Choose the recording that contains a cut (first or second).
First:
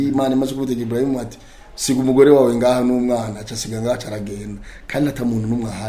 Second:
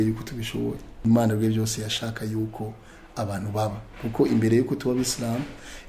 second